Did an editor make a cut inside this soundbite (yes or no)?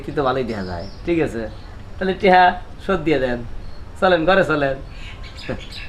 no